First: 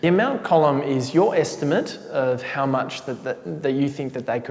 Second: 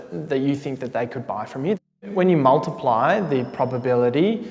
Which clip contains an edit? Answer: second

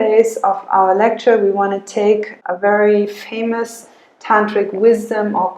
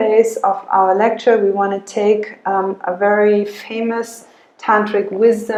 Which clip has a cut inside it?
first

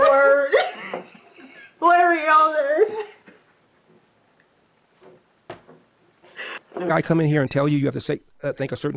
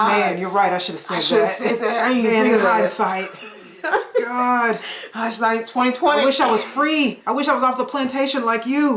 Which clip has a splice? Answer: first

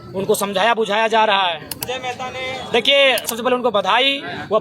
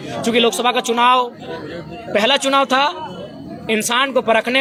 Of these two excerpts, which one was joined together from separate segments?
first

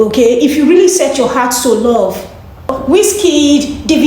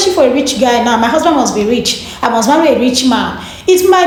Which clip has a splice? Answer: first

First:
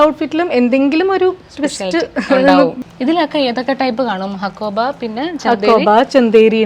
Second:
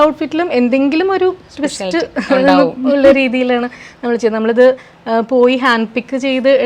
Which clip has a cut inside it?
first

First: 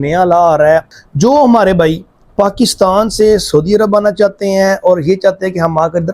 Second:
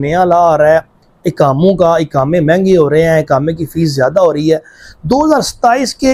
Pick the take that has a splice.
first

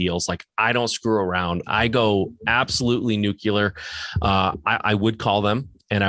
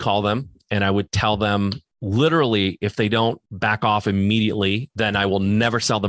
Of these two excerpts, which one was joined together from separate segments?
second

